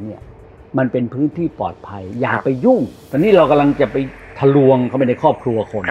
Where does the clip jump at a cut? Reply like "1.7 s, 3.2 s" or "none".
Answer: 3.0 s